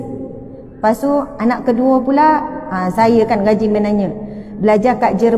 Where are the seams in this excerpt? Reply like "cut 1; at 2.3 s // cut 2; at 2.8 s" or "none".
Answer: none